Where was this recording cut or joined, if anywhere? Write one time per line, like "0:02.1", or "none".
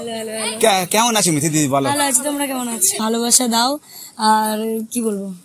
0:03.0